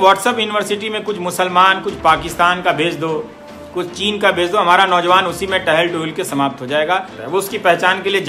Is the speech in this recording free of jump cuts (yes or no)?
no